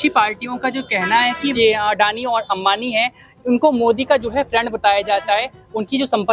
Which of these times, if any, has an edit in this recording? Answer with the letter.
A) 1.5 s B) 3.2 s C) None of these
A